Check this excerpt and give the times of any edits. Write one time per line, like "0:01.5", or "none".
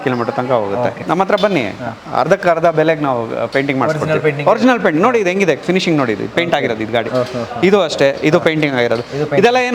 0:01.0